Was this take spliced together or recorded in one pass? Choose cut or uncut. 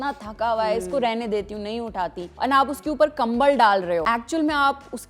cut